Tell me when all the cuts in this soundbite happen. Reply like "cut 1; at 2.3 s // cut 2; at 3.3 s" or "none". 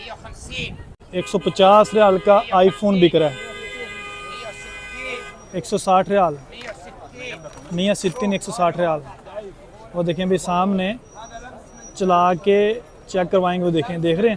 cut 1; at 1.0 s

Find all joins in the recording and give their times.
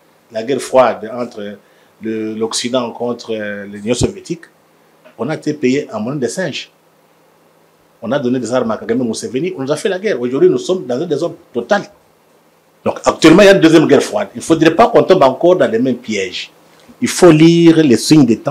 none

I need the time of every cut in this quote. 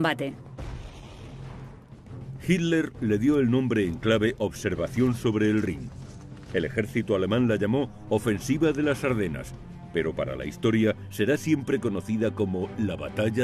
none

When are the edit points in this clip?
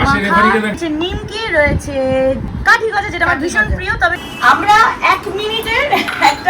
cut 1; at 0.7 s // cut 2; at 2.5 s // cut 3; at 4.2 s

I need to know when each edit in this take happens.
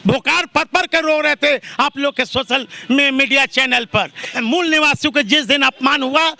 cut 1; at 4.3 s

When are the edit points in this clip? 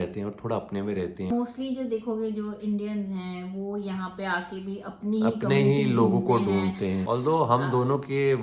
none

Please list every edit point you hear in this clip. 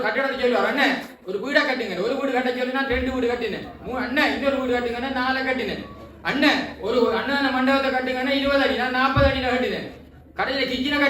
none

